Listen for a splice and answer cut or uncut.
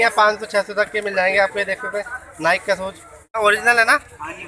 cut